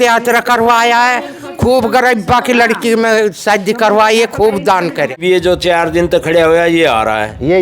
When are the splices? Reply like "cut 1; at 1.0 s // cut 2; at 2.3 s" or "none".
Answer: cut 1; at 5.2 s